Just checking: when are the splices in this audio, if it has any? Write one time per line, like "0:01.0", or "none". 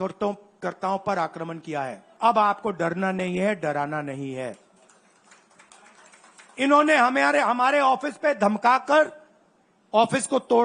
0:02.0